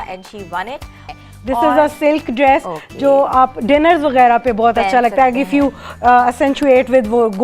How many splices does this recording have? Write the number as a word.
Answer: one